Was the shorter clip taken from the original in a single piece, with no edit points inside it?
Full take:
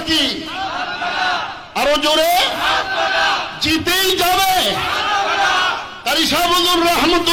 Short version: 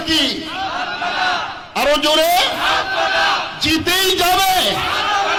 yes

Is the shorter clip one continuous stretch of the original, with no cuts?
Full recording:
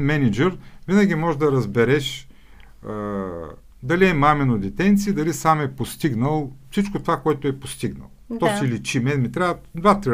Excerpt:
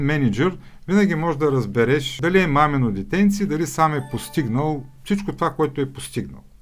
no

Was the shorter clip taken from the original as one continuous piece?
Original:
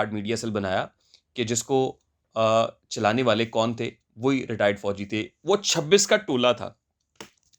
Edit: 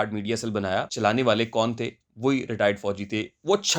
no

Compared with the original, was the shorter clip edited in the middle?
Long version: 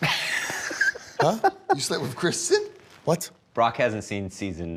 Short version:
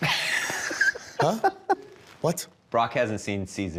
yes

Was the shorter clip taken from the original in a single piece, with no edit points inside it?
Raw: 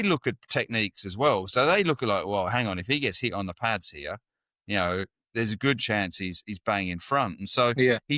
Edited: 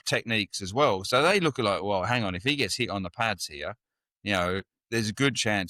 yes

